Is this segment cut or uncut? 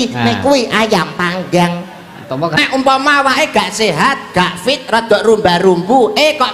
cut